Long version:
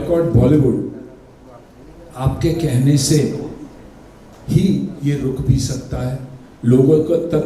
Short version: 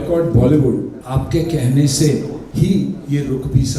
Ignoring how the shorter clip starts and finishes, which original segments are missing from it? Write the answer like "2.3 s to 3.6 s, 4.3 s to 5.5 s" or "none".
1.0 s to 2.1 s, 3.5 s to 4.3 s